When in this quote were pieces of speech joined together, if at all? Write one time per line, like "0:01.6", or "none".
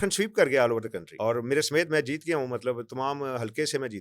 0:01.0